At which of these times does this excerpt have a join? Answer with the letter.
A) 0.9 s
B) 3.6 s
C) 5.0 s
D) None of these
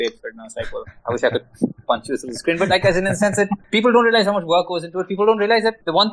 D